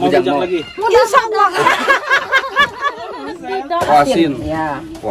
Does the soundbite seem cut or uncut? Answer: cut